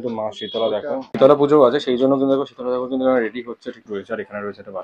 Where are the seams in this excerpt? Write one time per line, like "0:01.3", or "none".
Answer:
0:01.1
0:03.8